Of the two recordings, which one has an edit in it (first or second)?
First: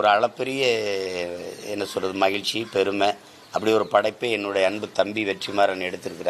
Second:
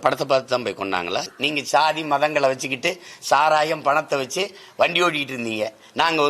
second